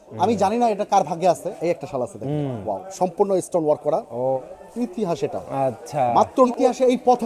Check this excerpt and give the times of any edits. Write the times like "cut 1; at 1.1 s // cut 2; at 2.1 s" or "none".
cut 1; at 1.5 s // cut 2; at 4.4 s // cut 3; at 6.5 s